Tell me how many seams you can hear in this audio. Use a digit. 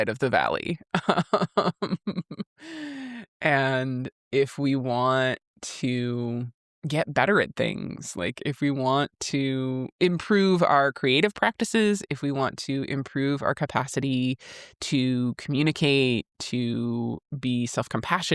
0